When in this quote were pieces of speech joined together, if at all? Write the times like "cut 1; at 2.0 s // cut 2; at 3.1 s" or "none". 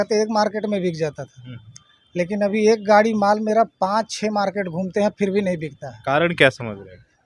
none